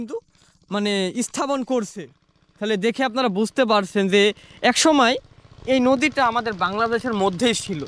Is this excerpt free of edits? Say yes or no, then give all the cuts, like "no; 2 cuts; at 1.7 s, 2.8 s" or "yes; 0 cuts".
yes; 0 cuts